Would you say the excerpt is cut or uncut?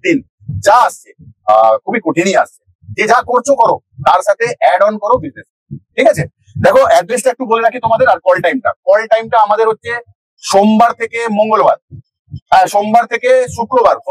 uncut